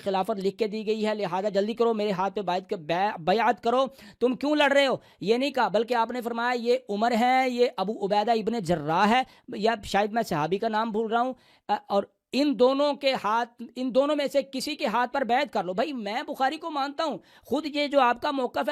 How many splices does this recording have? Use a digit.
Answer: 0